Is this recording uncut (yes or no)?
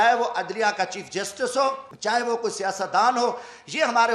no